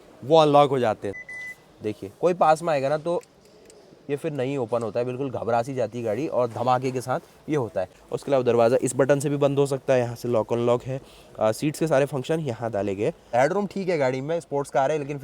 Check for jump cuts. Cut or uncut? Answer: cut